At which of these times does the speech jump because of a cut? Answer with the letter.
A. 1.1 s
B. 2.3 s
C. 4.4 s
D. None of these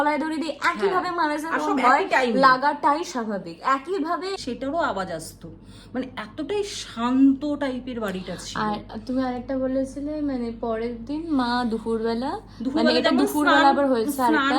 C